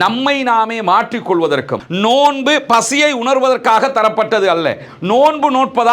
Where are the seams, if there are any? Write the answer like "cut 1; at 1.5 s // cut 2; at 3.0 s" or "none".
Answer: cut 1; at 1.8 s